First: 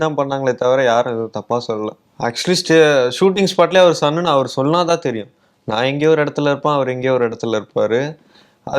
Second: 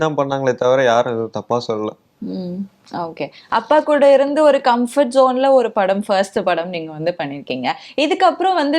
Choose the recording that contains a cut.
first; 1 cut; at 2.0 s

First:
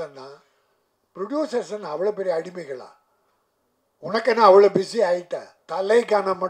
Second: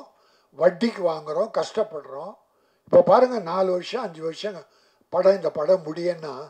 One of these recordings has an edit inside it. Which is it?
first; 1 cut; at 5.6 s

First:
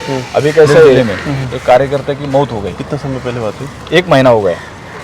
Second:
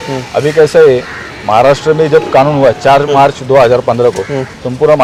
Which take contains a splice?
first; 1 cut; at 1.0 s

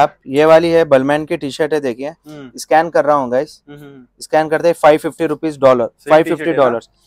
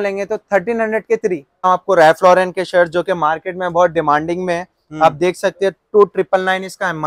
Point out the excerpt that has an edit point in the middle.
second; 1 cut; at 1.7 s

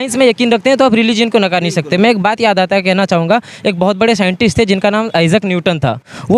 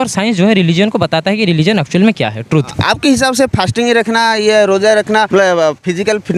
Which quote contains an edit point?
second; 2 cuts; at 2.9 s, 5.3 s

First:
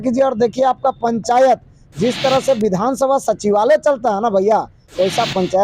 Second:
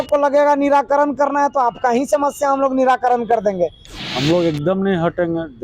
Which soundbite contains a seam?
second; 1 cut; at 3.9 s

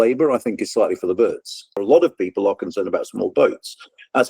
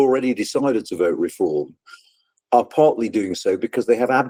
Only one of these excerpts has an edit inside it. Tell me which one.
first; 1 cut; at 1.8 s

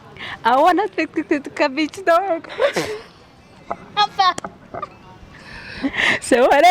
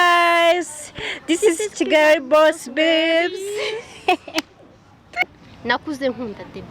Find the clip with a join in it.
second; 1 cut; at 5.2 s

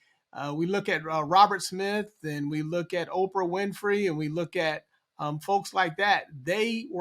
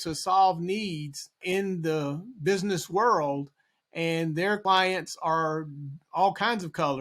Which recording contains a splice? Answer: second; 2 cuts; at 1.4 s, 4.6 s

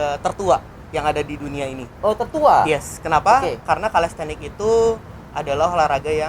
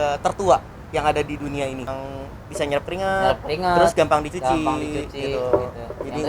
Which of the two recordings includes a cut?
second; 1 cut; at 1.9 s

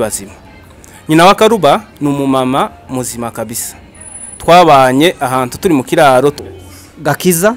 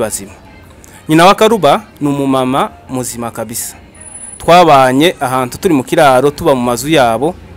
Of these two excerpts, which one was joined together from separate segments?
first; 1 cut; at 6.4 s

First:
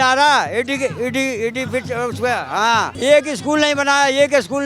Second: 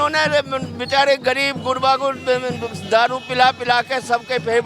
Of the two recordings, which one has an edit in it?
first; 1 cut; at 2.9 s

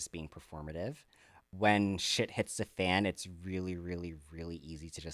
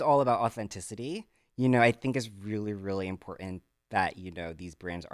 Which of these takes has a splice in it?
first; 1 cut; at 1.4 s

